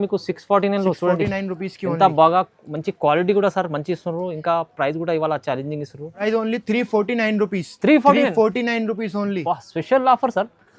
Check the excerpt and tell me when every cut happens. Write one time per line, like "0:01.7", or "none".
0:06.2